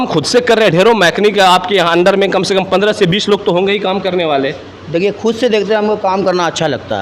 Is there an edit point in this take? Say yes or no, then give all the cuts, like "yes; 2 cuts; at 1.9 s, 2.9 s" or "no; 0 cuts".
no; 0 cuts